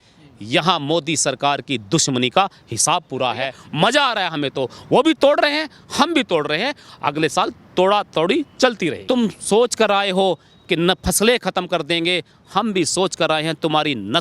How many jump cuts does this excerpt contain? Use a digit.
2